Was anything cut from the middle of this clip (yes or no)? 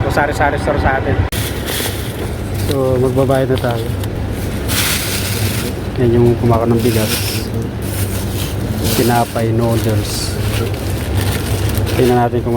yes